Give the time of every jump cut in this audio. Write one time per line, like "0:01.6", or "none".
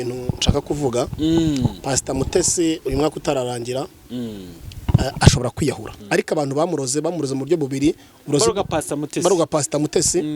0:05.9